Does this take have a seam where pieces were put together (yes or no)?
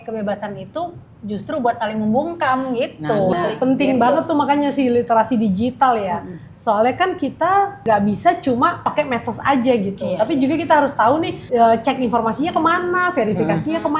yes